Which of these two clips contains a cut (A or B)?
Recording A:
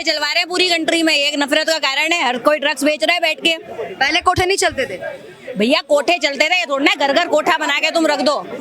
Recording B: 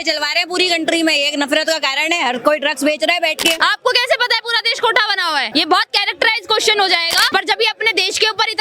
B